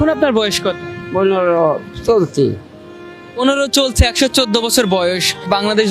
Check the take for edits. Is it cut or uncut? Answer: cut